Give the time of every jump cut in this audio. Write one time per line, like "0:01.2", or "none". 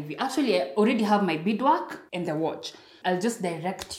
0:02.0
0:02.9